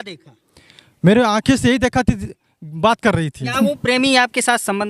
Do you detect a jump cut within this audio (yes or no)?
yes